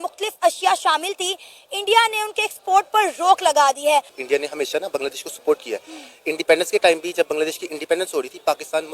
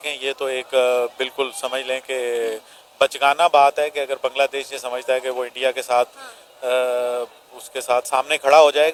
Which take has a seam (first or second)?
first